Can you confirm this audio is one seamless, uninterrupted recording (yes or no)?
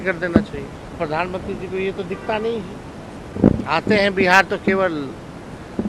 no